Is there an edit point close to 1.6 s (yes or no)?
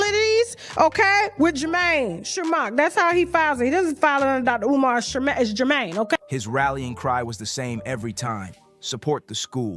no